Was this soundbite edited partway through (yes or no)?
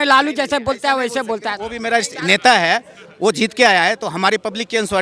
no